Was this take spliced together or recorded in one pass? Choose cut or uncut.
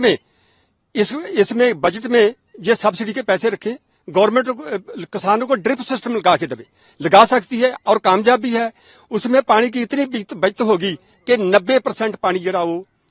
uncut